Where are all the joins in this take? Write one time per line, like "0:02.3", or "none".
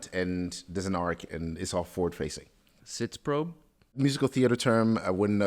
0:02.8
0:04.0